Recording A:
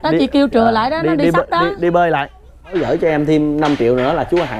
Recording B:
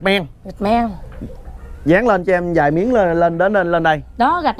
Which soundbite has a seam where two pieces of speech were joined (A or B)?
A